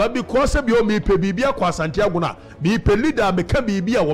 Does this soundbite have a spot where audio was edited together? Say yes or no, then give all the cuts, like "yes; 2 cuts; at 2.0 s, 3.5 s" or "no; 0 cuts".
no; 0 cuts